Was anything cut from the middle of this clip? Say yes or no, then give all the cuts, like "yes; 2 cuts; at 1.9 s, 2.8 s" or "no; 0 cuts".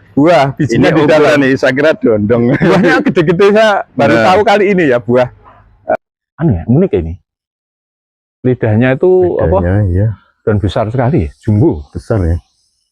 yes; 1 cut; at 6.0 s